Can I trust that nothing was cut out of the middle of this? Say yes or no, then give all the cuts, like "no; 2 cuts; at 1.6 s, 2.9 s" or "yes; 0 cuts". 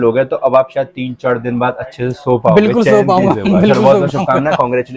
yes; 0 cuts